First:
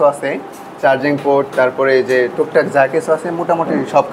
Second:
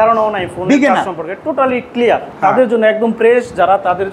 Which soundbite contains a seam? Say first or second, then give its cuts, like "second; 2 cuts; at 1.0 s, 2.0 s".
second; 1 cut; at 2.3 s